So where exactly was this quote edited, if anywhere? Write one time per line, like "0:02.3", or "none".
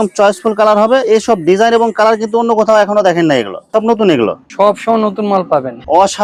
none